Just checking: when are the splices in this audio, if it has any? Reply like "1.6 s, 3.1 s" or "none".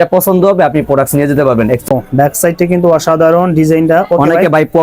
1.9 s